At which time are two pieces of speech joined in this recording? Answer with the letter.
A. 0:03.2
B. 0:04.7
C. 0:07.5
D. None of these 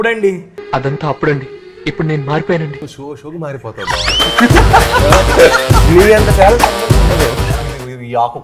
C